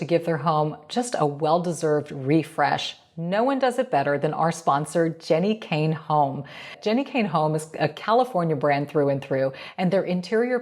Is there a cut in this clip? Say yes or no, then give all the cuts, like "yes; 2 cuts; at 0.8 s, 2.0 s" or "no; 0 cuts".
yes; 1 cut; at 6.8 s